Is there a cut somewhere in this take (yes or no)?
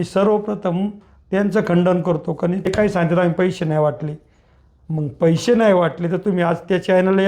yes